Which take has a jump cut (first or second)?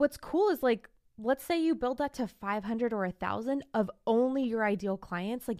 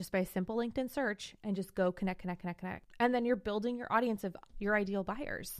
second